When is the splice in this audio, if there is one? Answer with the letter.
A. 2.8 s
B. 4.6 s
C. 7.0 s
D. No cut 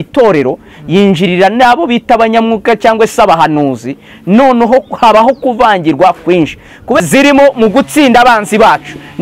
C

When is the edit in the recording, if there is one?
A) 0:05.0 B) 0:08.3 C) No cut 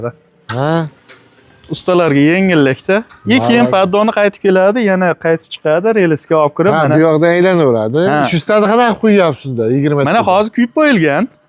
B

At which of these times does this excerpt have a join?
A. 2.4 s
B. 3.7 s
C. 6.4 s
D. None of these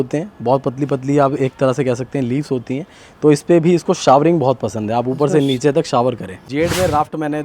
C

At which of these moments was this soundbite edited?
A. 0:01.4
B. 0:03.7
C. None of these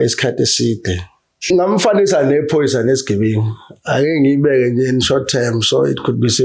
A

